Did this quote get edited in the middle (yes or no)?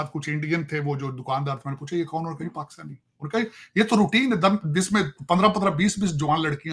no